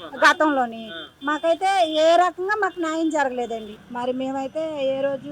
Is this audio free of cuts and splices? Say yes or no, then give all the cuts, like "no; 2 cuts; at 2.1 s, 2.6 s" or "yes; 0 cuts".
no; 1 cut; at 3.7 s